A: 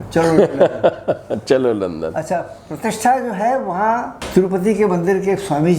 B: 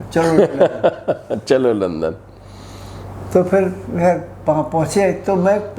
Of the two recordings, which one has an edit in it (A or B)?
A